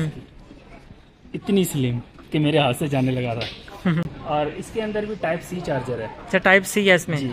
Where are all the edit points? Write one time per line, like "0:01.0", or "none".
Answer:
none